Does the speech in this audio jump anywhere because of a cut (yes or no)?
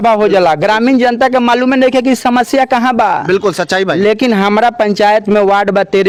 no